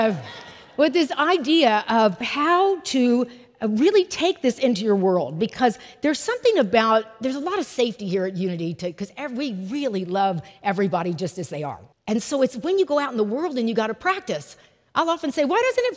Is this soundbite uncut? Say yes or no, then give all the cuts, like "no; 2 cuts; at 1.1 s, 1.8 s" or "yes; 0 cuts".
no; 2 cuts; at 2.3 s, 11.9 s